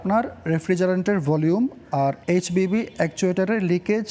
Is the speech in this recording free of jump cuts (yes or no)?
yes